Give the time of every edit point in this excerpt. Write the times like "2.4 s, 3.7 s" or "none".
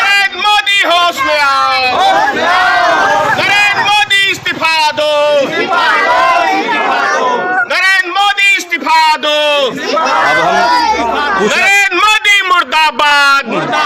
none